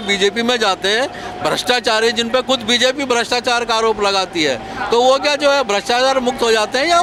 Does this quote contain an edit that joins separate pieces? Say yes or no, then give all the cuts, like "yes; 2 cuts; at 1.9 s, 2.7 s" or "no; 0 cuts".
no; 0 cuts